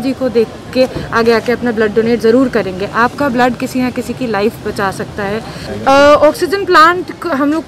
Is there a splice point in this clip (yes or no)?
yes